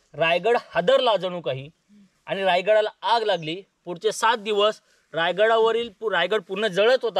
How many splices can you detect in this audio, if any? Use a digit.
0